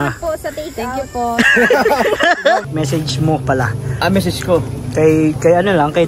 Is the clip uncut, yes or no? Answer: no